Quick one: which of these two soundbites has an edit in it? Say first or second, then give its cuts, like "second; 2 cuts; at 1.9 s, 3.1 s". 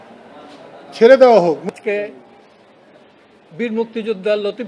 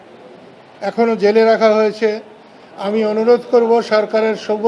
first; 1 cut; at 1.7 s